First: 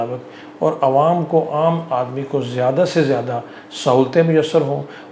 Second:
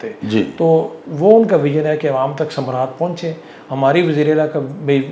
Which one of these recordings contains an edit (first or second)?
second